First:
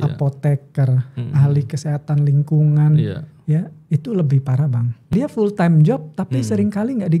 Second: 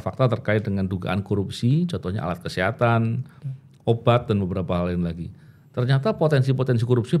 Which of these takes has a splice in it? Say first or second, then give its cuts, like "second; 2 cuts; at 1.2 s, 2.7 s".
first; 1 cut; at 5.1 s